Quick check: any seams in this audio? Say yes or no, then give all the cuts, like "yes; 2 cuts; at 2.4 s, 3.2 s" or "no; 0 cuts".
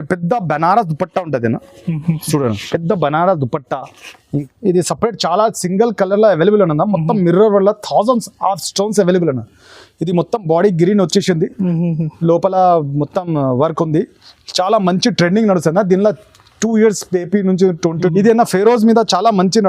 yes; 2 cuts; at 4.3 s, 18.1 s